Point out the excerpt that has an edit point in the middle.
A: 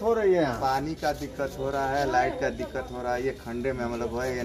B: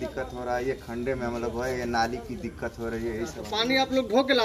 B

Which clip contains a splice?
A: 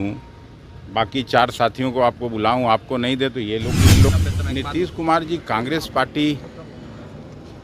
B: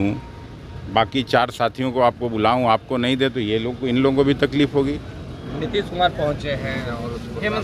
A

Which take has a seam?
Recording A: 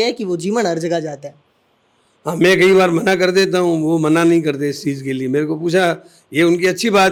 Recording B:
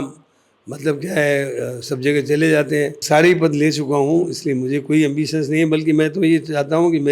B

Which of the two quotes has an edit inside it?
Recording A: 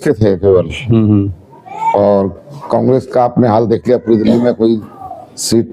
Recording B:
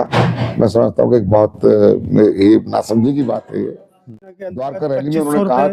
B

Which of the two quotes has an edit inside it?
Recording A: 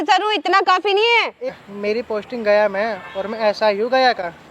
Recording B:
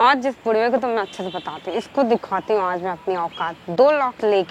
A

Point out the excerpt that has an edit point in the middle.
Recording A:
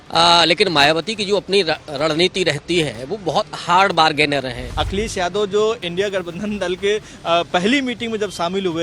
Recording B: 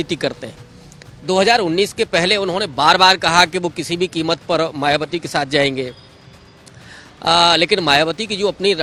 A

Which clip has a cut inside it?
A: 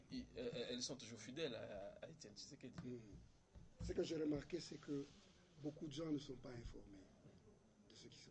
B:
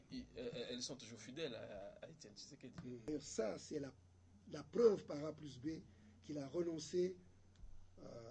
B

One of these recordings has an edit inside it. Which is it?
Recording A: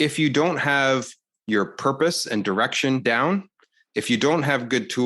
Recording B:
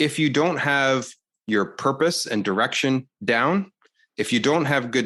A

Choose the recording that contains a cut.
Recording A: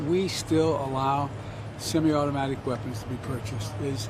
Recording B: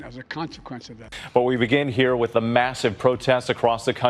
B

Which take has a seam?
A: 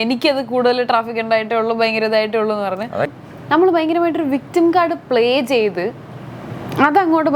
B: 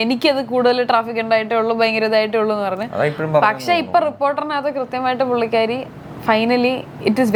A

